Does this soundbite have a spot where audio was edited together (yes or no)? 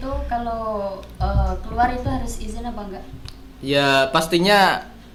no